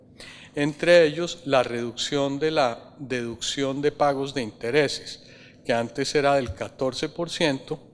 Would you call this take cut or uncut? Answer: uncut